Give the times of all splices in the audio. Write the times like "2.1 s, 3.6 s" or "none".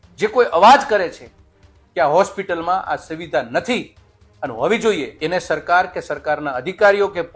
5.1 s